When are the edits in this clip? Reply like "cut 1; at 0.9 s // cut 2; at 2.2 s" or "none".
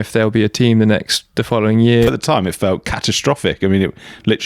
cut 1; at 2.1 s